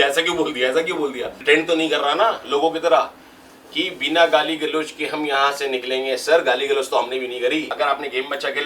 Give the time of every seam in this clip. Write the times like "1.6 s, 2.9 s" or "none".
1.3 s, 7.7 s